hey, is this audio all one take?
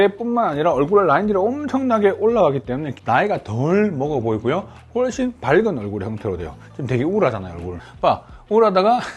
no; 2 cuts; at 2.9 s, 7.8 s

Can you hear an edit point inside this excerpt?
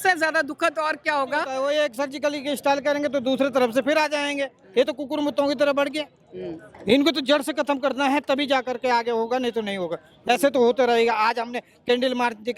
yes; 1 cut; at 1.6 s

